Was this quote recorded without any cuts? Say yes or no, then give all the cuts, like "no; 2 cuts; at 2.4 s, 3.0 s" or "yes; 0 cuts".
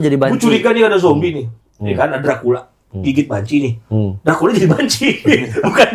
yes; 0 cuts